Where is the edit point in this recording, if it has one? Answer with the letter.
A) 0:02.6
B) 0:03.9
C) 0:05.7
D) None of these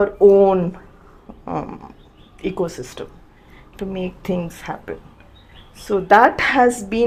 D